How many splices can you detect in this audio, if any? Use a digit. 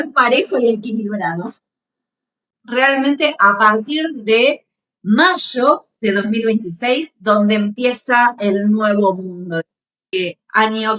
2